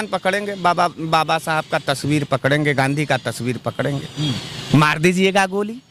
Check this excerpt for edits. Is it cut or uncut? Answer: uncut